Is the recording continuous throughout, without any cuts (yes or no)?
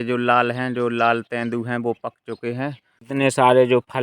no